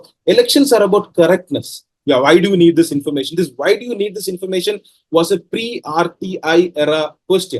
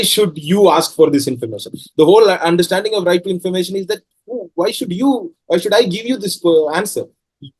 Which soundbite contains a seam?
first; 1 cut; at 1.9 s

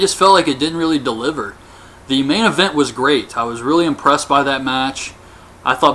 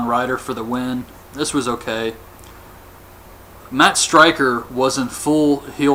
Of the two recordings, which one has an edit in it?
first; 1 cut; at 1.0 s

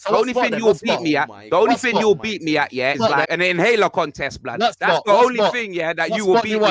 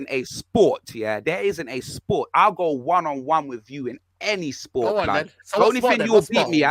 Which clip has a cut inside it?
first; 1 cut; at 3.0 s

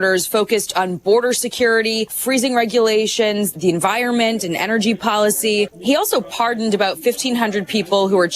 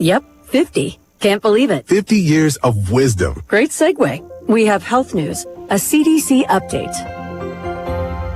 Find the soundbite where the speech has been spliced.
first; 3 cuts; at 2.2 s, 3.5 s, 5.8 s

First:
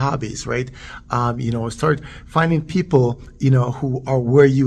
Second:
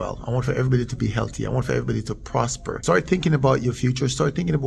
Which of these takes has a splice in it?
second; 1 cut; at 2.7 s

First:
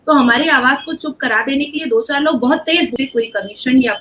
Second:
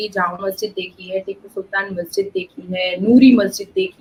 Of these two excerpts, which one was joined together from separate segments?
first; 1 cut; at 2.9 s

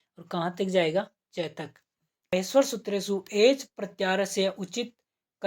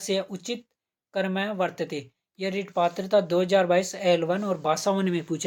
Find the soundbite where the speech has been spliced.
first; 1 cut; at 2.3 s

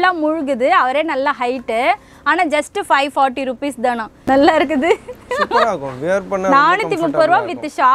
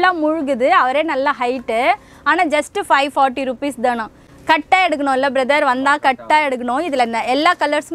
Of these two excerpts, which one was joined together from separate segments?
first; 1 cut; at 4.1 s

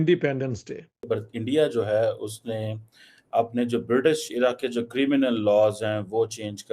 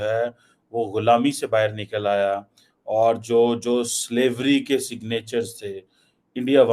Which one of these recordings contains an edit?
first; 1 cut; at 0.9 s

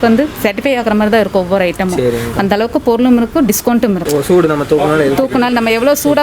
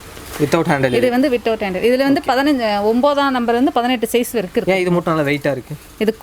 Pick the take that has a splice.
first; 1 cut; at 4.0 s

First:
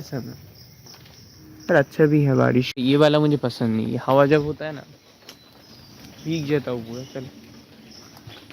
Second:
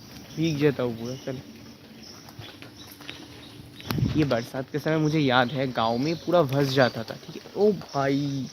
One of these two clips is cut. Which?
first; 1 cut; at 2.7 s

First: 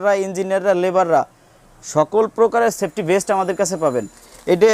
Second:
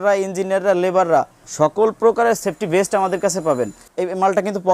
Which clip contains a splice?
second; 2 cuts; at 1.4 s, 3.8 s

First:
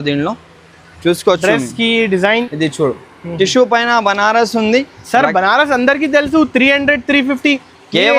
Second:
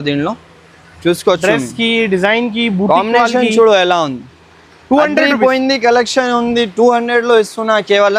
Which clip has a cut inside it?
first; 1 cut; at 2.5 s

